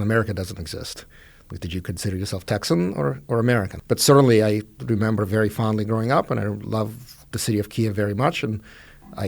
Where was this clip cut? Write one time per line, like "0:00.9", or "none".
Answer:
0:03.8